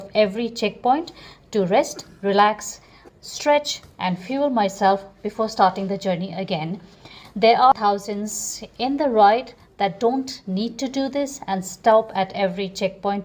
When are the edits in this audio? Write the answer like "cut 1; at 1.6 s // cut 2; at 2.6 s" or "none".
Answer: none